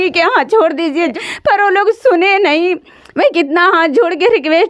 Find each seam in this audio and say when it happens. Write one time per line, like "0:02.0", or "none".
0:01.1

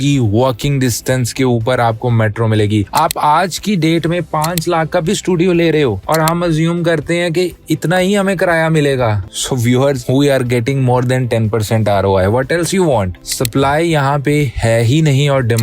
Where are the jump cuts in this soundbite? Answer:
0:02.9
0:13.2

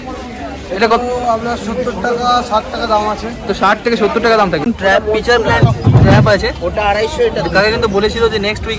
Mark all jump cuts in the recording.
0:04.6

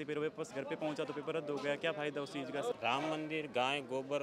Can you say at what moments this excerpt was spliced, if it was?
0:02.7

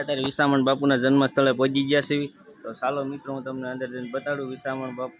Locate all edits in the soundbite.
none

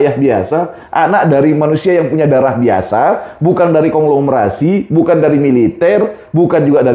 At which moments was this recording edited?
none

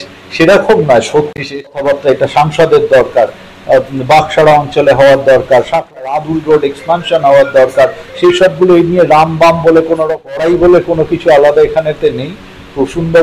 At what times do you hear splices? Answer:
0:01.2
0:06.1
0:10.4

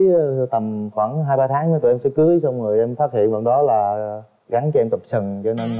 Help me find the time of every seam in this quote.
none

